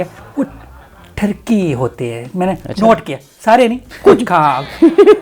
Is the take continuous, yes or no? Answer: yes